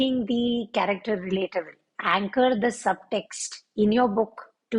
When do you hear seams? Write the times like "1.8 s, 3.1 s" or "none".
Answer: 1.8 s